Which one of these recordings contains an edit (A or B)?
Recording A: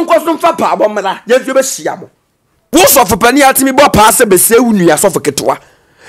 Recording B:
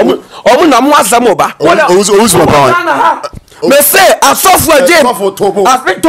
A